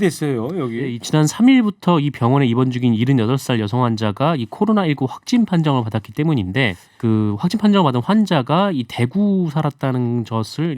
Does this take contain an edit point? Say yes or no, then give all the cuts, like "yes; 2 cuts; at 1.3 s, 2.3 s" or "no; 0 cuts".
yes; 2 cuts; at 1.0 s, 6.9 s